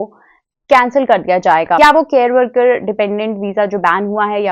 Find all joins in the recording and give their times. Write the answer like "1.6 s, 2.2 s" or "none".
1.8 s